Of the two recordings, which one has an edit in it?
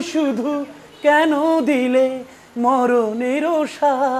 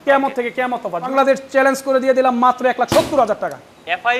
second; 1 cut; at 1.1 s

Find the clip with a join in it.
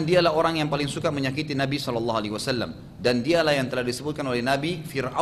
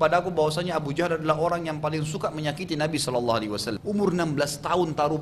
second; 1 cut; at 3.7 s

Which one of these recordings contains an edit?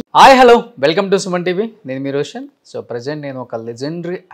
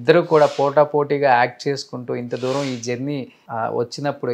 second; 1 cut; at 3.4 s

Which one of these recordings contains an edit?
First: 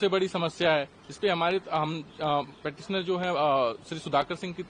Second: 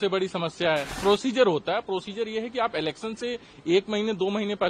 second; 1 cut; at 0.9 s

